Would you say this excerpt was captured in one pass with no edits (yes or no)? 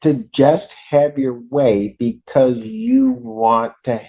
yes